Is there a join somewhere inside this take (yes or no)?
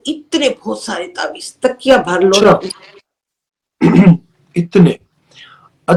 no